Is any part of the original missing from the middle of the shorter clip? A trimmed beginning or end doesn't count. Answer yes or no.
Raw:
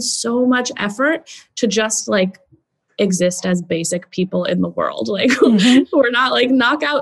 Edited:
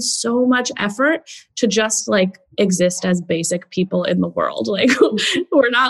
yes